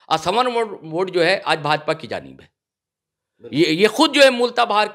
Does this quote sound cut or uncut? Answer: uncut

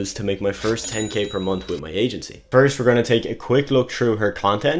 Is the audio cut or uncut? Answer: cut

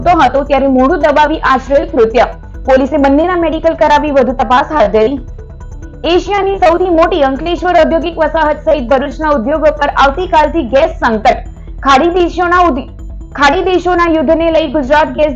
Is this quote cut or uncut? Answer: uncut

